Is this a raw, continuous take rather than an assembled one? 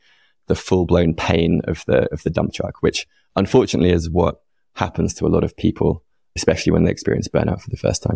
no; 1 cut; at 6.4 s

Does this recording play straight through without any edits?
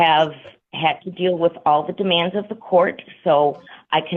yes; 0 cuts

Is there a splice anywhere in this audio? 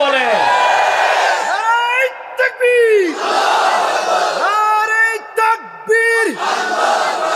no; 0 cuts

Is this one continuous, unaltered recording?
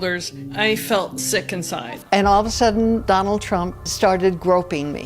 no; 1 cut; at 2.0 s

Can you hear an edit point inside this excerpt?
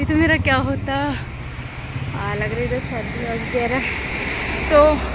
no; 0 cuts

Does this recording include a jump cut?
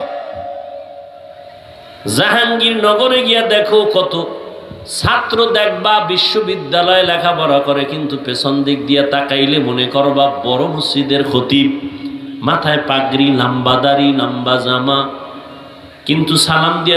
no; 0 cuts

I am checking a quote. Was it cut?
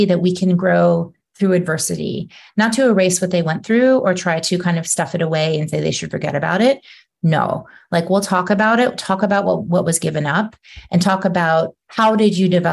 yes; 1 cut; at 11.8 s

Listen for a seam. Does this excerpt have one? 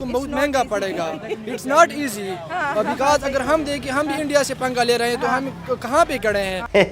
no; 0 cuts

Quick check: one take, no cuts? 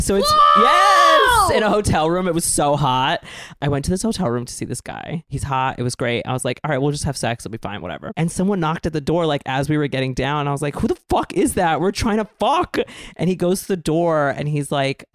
no; 3 cuts; at 3.6 s, 5.3 s, 8.0 s

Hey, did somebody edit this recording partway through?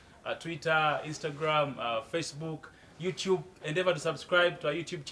no; 0 cuts

